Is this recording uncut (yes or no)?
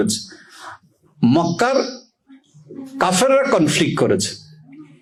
yes